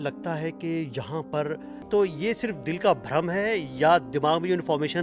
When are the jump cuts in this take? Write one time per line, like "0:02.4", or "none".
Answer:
0:01.7